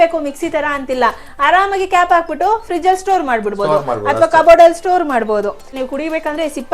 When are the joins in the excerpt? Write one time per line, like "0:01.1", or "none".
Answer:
0:05.8

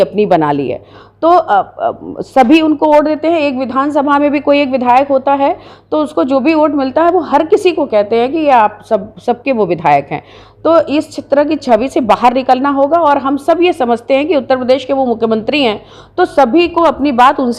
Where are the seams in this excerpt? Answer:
none

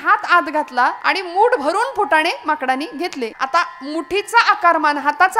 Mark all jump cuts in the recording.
0:01.0
0:03.3

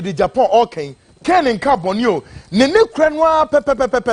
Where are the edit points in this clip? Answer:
none

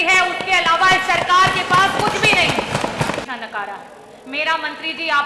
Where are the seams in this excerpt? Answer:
0:03.2

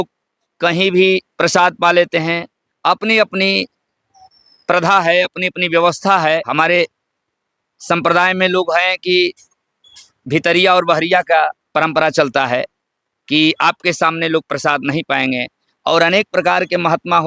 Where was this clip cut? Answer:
none

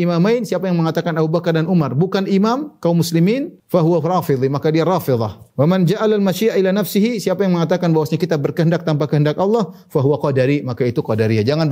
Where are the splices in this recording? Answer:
0:03.5
0:05.4

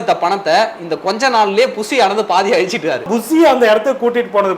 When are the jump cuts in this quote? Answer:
0:03.1

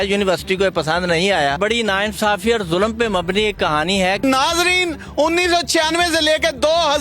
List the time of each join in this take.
0:01.6
0:04.2

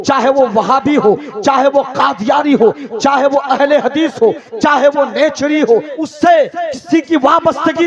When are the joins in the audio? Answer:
0:06.0

